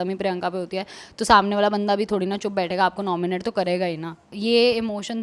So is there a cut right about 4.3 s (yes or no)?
yes